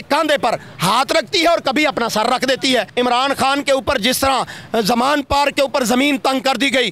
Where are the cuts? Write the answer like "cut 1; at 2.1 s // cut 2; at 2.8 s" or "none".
cut 1; at 2.9 s